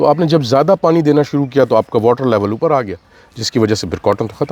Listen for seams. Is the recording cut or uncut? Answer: uncut